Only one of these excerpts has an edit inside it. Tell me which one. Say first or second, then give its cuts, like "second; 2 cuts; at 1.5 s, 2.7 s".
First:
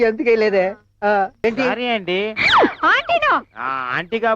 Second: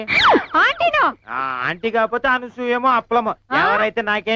first; 1 cut; at 1.4 s